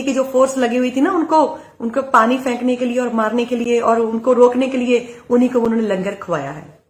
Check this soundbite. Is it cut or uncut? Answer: uncut